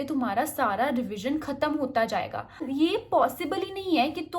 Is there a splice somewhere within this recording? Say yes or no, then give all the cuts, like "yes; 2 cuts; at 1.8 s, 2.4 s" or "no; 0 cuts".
yes; 1 cut; at 2.7 s